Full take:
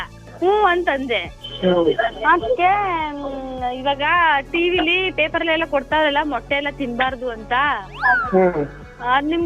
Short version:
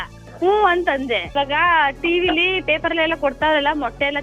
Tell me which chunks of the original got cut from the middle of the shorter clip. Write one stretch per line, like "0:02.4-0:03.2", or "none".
0:01.3-0:03.8